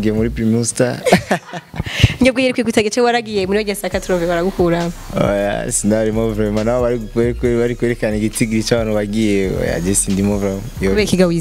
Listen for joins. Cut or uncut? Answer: uncut